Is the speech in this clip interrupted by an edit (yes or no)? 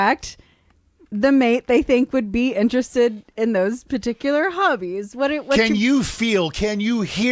no